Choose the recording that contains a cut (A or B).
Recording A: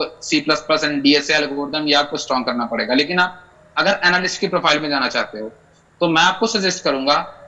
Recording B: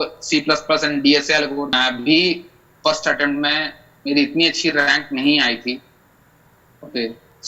B